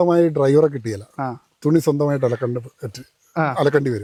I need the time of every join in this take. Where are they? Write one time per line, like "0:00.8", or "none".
none